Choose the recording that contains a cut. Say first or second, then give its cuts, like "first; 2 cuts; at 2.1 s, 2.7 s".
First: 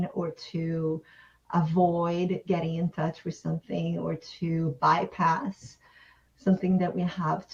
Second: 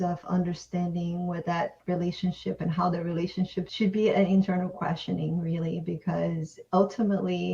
second; 1 cut; at 3.7 s